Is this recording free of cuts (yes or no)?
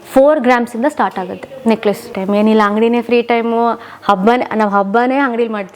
no